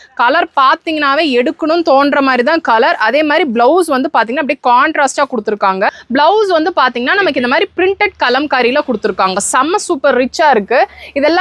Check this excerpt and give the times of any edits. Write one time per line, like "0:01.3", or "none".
0:06.0